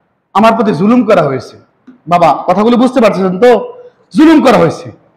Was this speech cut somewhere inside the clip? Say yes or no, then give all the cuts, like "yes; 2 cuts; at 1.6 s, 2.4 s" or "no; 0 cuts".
no; 0 cuts